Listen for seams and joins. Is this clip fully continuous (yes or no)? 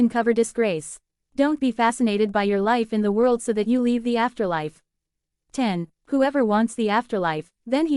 no